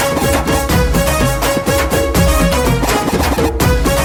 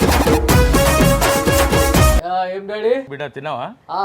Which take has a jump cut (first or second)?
second